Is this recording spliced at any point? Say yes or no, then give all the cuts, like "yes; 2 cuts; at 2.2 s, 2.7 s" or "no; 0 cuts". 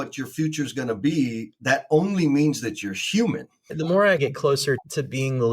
yes; 1 cut; at 3.5 s